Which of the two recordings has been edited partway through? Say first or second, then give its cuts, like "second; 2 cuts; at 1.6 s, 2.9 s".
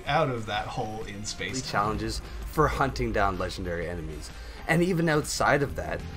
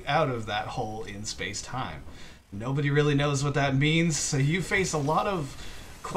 first; 1 cut; at 1.6 s